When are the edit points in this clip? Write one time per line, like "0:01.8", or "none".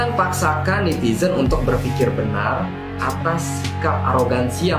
none